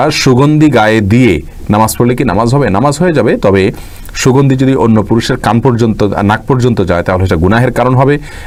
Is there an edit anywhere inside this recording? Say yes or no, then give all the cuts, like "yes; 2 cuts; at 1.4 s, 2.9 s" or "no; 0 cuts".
no; 0 cuts